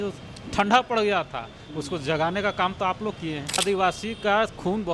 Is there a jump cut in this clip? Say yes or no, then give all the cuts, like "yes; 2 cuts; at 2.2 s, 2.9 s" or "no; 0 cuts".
yes; 1 cut; at 3.6 s